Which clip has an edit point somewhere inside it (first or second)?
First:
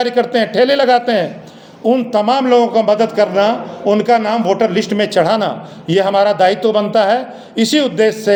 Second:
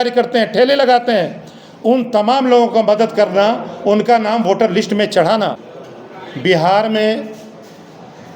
second